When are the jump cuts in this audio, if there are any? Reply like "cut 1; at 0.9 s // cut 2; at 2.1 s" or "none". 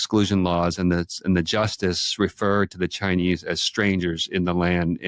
none